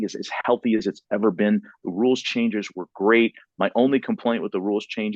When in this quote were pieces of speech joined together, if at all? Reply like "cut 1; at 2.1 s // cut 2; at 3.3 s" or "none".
none